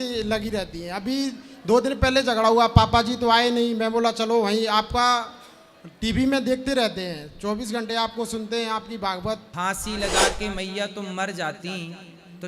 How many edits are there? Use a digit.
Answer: 1